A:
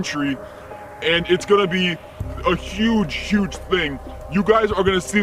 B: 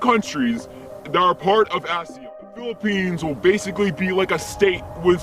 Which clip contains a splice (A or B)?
B